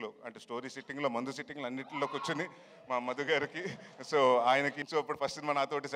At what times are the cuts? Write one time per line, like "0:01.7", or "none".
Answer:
0:04.8